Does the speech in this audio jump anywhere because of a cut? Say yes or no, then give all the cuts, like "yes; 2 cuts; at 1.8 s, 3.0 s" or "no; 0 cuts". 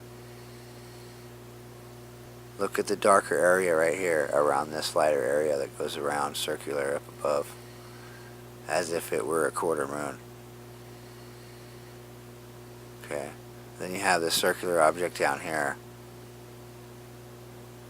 yes; 1 cut; at 1.9 s